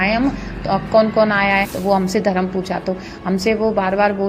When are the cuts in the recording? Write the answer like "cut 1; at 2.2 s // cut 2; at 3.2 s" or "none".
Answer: cut 1; at 1.7 s